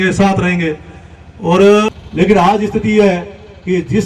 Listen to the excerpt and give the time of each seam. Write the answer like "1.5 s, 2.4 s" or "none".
2.0 s